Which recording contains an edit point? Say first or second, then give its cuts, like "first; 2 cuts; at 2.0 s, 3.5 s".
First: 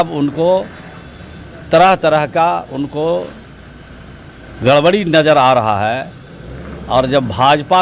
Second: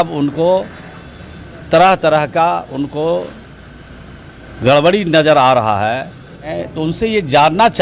second; 1 cut; at 6.6 s